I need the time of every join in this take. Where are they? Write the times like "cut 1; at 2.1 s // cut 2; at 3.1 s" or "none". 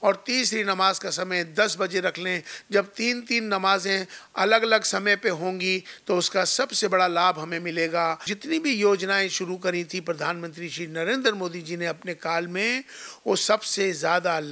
cut 1; at 8.3 s